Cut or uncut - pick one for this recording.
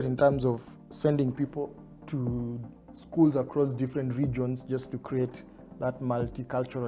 uncut